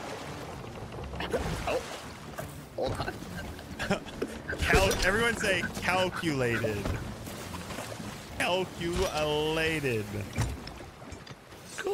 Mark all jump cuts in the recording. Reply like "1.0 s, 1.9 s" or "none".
8.4 s